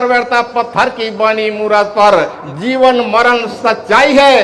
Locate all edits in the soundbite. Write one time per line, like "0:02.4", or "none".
0:02.2